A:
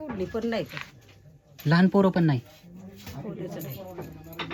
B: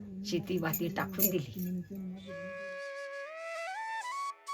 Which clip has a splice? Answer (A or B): B